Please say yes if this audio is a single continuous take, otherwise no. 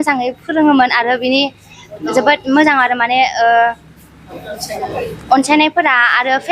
yes